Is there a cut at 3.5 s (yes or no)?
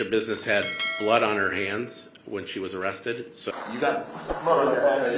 yes